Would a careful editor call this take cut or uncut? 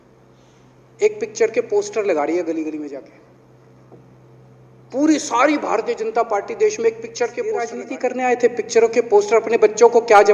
cut